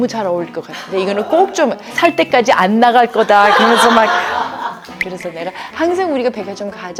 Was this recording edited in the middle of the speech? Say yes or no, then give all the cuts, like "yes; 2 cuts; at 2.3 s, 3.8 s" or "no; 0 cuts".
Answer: no; 0 cuts